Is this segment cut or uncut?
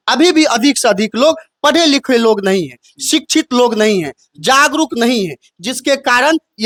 uncut